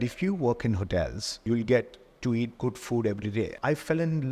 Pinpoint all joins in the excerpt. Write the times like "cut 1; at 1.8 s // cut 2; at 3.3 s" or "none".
cut 1; at 1.5 s // cut 2; at 3.5 s